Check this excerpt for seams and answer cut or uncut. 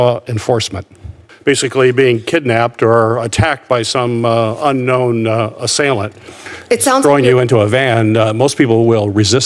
cut